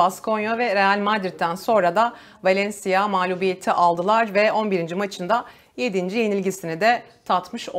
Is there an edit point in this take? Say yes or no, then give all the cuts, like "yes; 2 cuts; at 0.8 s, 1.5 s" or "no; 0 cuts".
no; 0 cuts